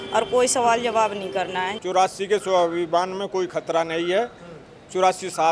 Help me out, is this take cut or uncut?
cut